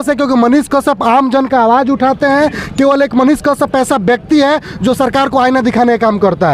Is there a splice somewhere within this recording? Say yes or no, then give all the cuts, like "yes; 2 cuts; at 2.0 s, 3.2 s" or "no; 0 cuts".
no; 0 cuts